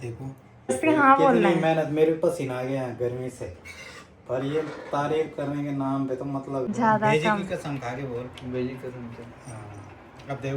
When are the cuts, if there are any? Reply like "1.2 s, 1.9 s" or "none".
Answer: 0.8 s, 6.7 s